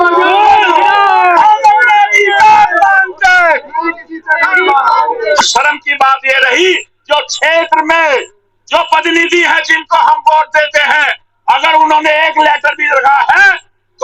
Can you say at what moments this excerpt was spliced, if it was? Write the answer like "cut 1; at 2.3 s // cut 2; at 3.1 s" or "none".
cut 1; at 5.4 s